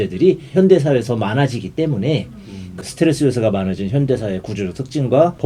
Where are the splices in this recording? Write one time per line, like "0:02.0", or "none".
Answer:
0:02.6